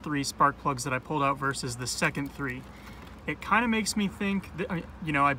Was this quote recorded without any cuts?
yes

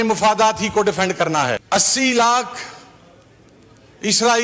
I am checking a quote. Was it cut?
yes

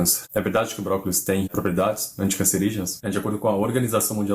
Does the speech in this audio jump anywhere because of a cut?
yes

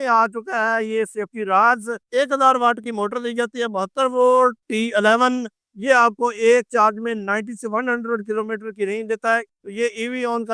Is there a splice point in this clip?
yes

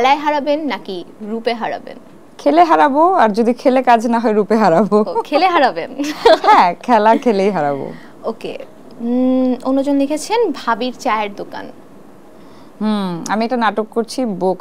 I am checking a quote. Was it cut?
no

